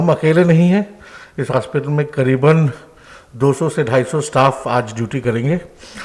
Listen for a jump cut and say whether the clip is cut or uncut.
uncut